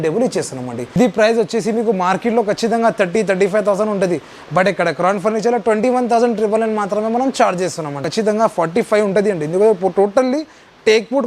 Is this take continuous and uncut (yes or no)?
no